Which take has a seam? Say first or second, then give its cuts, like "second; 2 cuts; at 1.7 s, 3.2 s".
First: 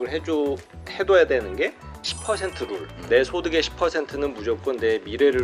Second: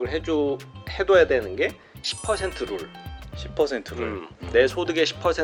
first; 1 cut; at 2.9 s